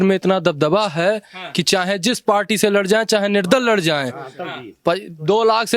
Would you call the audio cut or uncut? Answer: uncut